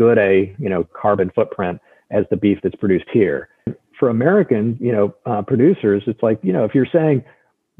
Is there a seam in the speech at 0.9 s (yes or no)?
no